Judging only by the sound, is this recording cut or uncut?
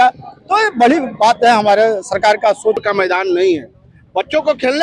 cut